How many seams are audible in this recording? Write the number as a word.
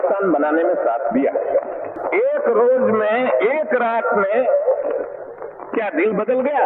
one